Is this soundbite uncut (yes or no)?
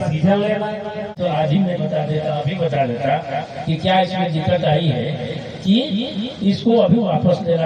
no